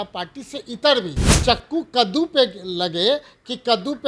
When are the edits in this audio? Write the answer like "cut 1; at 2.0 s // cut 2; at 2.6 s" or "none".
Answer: cut 1; at 1.2 s